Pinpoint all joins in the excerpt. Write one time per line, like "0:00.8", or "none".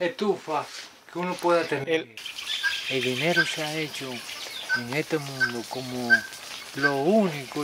0:02.1